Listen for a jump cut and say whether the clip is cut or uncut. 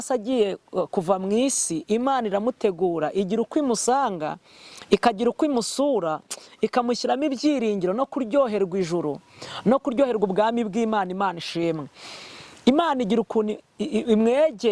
uncut